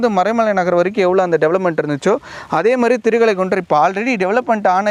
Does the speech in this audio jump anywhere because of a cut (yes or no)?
no